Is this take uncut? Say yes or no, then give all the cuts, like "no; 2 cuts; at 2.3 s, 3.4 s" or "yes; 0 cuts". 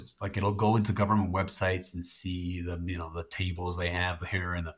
yes; 0 cuts